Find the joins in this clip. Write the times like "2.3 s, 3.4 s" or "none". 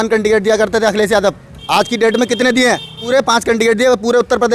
1.5 s, 2.9 s